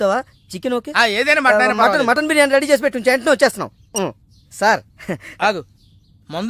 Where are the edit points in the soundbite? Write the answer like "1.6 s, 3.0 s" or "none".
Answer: none